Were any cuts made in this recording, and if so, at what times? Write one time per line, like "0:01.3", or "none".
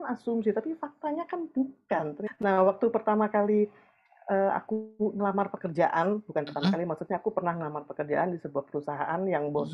0:02.2